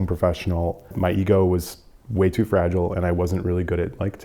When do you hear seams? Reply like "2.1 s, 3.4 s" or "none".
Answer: 0.9 s